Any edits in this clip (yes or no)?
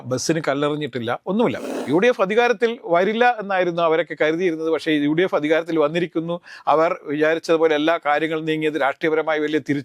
yes